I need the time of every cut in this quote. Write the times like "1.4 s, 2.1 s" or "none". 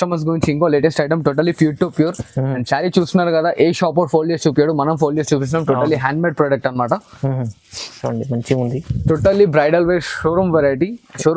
none